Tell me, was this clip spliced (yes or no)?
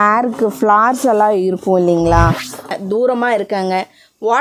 yes